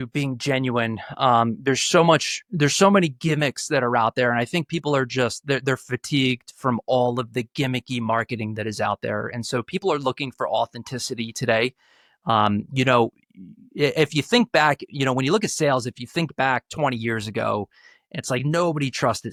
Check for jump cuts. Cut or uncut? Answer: uncut